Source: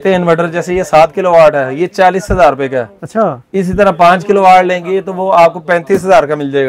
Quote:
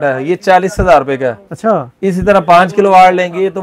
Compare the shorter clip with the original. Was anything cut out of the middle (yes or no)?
no